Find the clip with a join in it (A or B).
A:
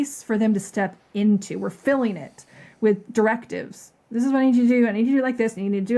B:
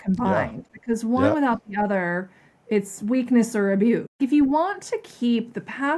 B